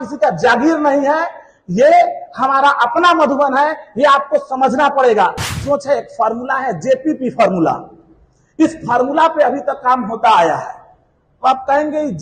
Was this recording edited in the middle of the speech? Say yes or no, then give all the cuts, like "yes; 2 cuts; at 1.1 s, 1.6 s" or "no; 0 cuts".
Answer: yes; 1 cut; at 5.5 s